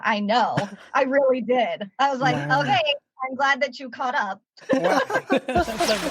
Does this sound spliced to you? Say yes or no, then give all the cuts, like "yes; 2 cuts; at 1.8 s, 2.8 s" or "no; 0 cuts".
no; 0 cuts